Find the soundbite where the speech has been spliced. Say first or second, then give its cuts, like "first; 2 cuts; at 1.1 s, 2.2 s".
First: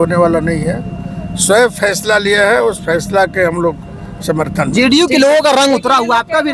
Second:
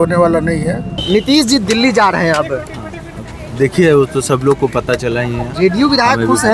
second; 1 cut; at 0.9 s